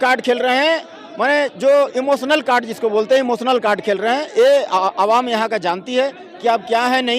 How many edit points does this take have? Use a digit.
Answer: 0